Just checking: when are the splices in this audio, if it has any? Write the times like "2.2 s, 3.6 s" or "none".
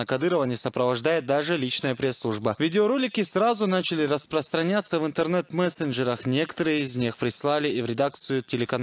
none